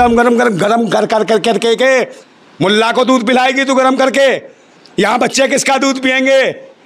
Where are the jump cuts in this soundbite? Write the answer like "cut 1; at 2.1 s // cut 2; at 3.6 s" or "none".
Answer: none